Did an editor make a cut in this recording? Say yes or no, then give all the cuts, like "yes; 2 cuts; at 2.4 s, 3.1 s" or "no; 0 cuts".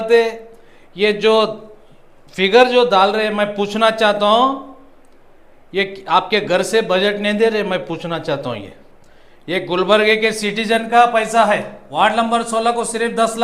yes; 1 cut; at 11.8 s